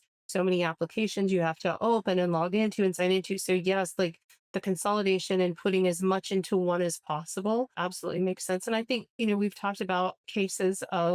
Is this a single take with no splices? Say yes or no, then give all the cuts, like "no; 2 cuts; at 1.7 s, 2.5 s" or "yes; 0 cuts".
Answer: no; 2 cuts; at 7.7 s, 10.2 s